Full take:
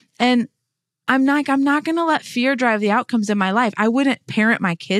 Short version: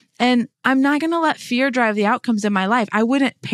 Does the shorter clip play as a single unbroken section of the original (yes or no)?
no